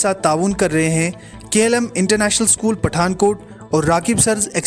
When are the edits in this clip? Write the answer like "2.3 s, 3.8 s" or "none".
none